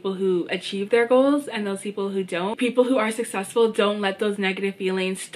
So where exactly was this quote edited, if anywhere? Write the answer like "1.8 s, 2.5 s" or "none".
2.5 s